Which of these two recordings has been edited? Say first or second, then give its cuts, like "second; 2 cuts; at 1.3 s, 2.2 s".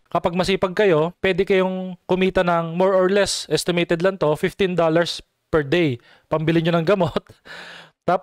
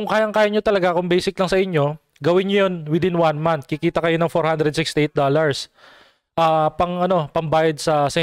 first; 1 cut; at 1.1 s